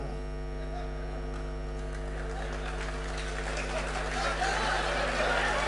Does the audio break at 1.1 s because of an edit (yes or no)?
no